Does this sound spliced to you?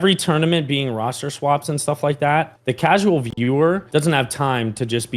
yes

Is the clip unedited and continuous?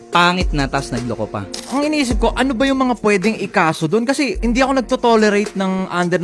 no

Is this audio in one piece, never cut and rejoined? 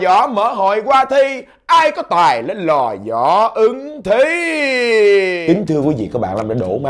no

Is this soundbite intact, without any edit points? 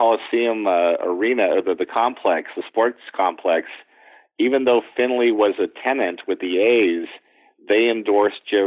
yes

